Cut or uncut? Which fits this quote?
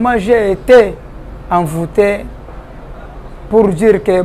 uncut